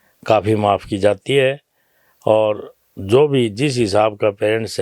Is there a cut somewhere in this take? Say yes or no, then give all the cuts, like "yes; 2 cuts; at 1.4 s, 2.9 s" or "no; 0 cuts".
no; 0 cuts